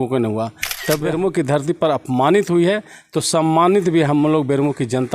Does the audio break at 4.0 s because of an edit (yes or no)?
no